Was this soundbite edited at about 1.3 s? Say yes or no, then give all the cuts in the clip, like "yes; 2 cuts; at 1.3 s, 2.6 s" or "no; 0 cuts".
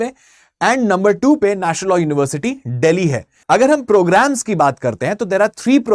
no; 1 cut; at 3.3 s